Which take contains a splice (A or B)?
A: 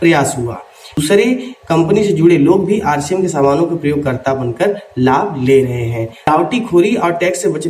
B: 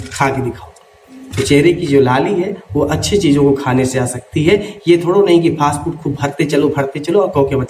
A